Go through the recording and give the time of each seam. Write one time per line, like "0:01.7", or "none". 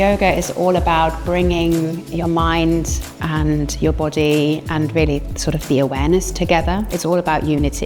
none